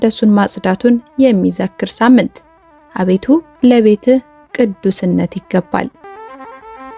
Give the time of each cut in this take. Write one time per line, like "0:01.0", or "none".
0:06.0